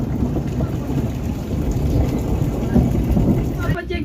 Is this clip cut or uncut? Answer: uncut